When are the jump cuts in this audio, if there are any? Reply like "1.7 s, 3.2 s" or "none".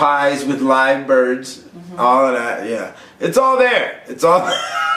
none

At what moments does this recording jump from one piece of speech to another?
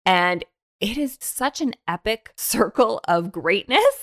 1.2 s, 2.3 s

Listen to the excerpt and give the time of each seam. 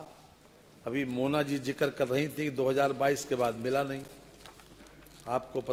none

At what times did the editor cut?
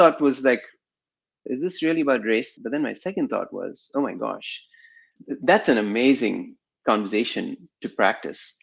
5.1 s

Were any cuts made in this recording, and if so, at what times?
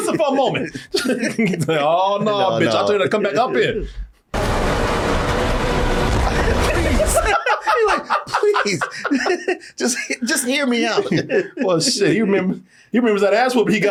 none

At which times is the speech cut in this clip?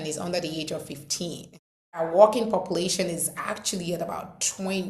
2.0 s

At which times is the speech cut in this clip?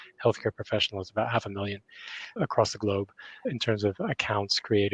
3.5 s

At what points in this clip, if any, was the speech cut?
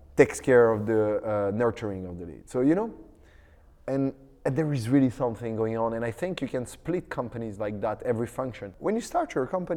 8.7 s

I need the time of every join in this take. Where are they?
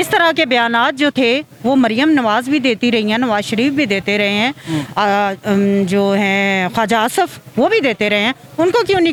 none

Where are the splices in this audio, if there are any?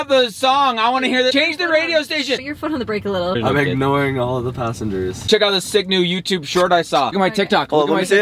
3.3 s, 5.2 s

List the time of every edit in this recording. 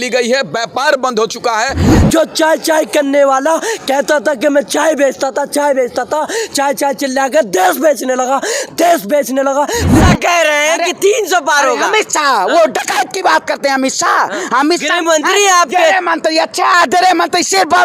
1.9 s, 10.0 s

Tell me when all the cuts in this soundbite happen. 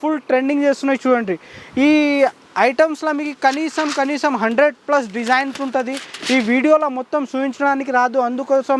none

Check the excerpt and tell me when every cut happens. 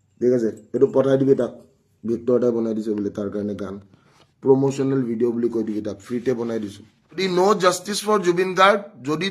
7.2 s

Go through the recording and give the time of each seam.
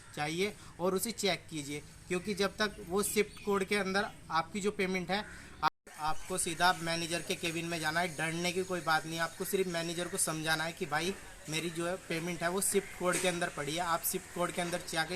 5.7 s

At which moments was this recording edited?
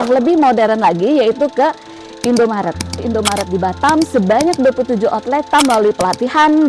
3.0 s, 5.5 s

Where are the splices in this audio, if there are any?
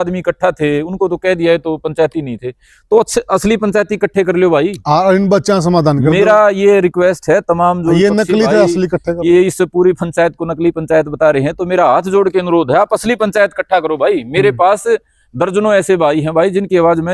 none

